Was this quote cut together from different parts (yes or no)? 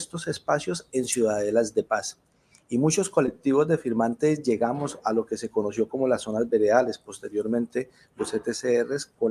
no